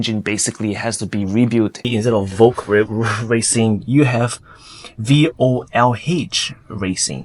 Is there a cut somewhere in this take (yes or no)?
yes